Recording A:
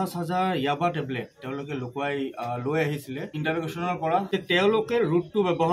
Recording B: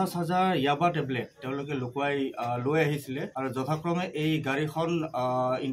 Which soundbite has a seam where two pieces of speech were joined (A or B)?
A